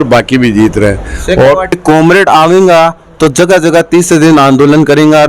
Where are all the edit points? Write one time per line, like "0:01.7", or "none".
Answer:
0:01.7